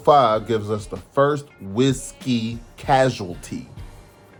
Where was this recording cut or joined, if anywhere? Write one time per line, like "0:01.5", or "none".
none